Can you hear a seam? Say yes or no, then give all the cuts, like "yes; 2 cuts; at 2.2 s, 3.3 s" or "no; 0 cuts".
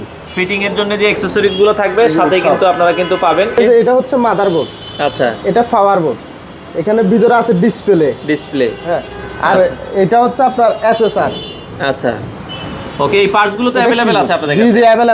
yes; 1 cut; at 3.6 s